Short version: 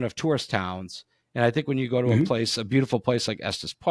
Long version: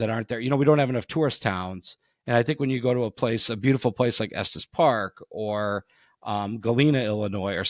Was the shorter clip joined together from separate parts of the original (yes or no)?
no